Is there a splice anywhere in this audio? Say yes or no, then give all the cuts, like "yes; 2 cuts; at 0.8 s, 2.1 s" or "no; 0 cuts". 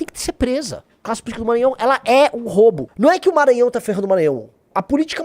yes; 2 cuts; at 1.0 s, 2.9 s